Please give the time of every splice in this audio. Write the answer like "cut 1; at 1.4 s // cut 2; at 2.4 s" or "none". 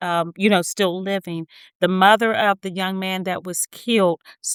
none